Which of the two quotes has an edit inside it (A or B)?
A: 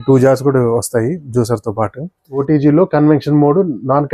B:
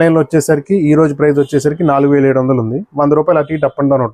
A